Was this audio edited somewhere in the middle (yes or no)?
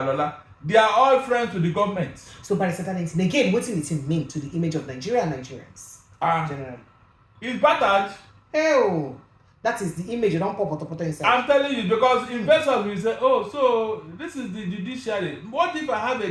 no